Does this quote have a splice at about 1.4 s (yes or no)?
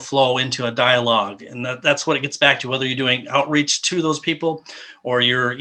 no